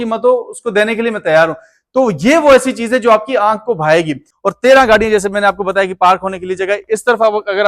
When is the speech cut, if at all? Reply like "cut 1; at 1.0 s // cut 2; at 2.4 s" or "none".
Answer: cut 1; at 4.2 s